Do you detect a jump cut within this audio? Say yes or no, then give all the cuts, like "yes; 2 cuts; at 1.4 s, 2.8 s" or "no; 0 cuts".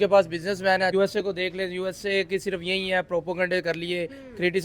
yes; 1 cut; at 0.9 s